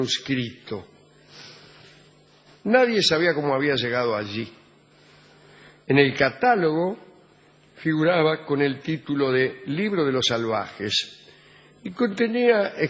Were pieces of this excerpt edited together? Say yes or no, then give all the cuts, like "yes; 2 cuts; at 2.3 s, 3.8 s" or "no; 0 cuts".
no; 0 cuts